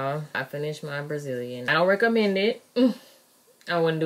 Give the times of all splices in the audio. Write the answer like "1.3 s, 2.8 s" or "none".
1.7 s